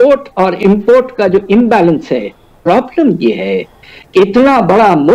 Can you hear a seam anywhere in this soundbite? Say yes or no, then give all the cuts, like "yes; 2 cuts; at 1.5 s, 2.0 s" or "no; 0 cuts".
yes; 1 cut; at 2.5 s